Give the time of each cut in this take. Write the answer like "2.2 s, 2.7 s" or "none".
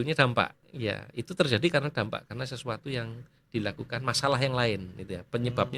none